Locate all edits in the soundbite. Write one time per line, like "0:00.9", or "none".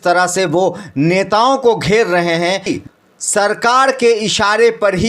0:02.7